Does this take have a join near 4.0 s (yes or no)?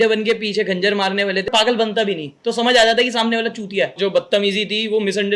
yes